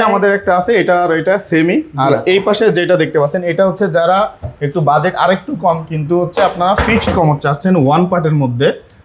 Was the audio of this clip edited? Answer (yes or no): no